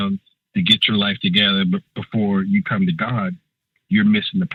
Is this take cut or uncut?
uncut